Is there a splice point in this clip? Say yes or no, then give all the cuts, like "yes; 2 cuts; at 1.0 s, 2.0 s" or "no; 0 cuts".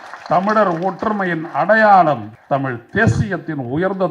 yes; 1 cut; at 2.3 s